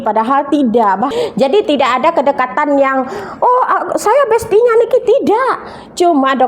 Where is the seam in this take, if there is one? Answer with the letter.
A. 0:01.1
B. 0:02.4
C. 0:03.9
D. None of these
A